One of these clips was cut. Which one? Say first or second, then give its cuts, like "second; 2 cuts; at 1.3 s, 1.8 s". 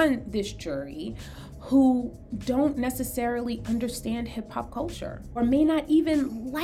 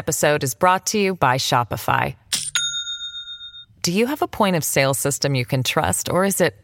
first; 1 cut; at 5.4 s